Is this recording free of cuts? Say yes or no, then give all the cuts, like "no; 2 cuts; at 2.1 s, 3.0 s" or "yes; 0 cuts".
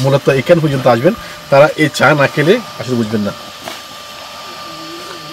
yes; 0 cuts